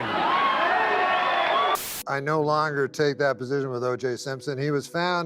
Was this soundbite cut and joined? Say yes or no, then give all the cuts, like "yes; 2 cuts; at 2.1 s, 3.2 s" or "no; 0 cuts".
yes; 1 cut; at 1.8 s